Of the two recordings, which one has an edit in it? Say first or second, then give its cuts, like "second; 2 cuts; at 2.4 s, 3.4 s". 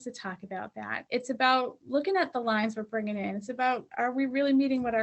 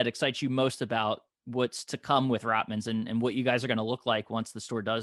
first; 2 cuts; at 0.9 s, 3.9 s